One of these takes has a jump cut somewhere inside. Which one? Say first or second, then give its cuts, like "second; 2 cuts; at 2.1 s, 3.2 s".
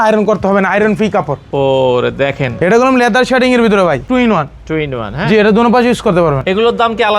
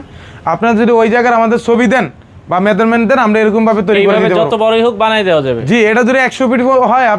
first; 3 cuts; at 2.5 s, 4.1 s, 6.4 s